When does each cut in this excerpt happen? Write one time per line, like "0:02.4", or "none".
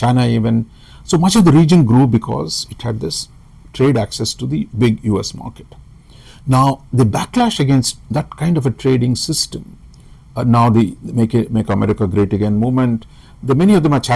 none